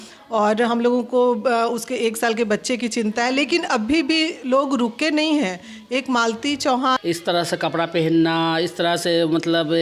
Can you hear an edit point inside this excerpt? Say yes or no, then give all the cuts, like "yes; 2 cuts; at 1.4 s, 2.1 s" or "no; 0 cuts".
yes; 1 cut; at 7.0 s